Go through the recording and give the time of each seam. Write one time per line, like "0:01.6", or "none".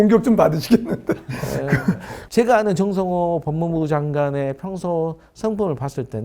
0:02.1

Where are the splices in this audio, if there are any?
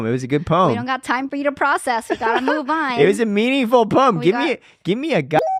none

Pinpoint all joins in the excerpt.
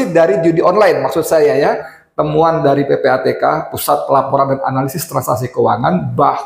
0:01.9

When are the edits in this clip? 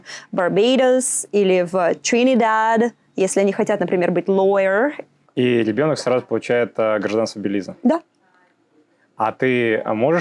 0:05.2

